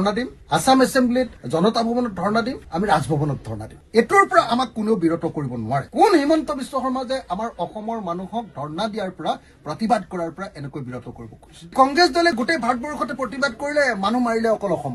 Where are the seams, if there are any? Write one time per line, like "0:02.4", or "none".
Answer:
none